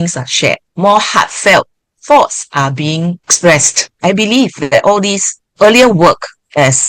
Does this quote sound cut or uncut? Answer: uncut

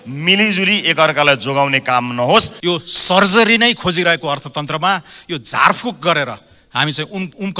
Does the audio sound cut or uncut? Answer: cut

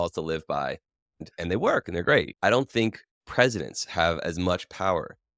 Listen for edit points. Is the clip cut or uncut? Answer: cut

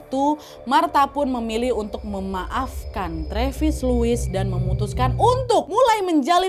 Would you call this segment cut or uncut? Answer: uncut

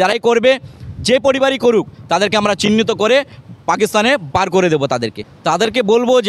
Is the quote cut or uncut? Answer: uncut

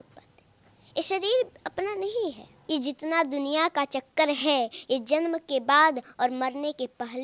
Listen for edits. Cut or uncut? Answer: cut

